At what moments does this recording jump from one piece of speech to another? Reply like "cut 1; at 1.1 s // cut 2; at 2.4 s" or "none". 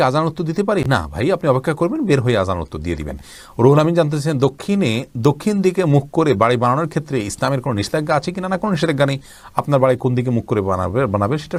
none